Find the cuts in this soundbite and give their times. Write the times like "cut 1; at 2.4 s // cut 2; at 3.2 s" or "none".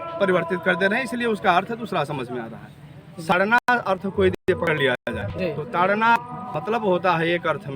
cut 1; at 3.3 s